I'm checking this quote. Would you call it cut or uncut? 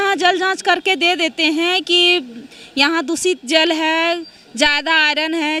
uncut